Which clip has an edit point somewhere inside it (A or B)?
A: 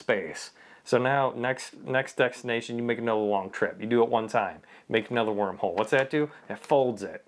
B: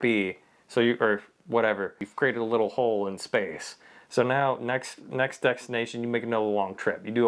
B